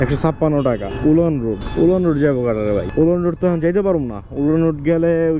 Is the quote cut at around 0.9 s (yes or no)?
yes